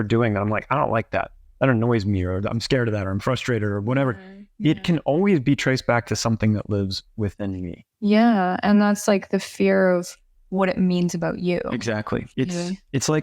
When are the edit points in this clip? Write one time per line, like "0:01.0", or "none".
0:12.3